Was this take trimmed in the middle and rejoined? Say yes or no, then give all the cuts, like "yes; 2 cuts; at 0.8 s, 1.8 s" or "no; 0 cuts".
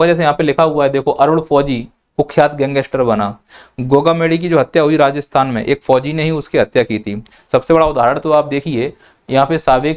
no; 0 cuts